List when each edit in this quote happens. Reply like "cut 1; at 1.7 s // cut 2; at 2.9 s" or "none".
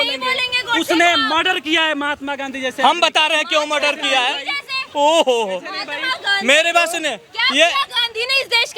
none